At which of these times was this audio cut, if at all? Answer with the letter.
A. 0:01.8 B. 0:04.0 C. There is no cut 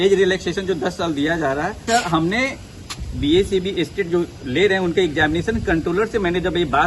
A